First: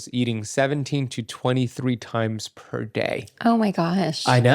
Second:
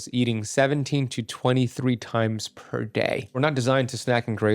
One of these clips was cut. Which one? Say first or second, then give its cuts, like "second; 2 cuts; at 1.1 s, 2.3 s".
second; 1 cut; at 3.4 s